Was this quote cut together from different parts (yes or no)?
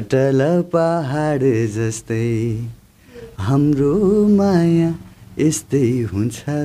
no